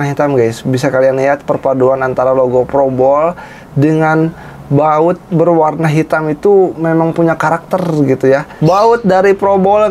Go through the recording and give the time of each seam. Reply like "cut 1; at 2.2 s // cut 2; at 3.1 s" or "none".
cut 1; at 8.5 s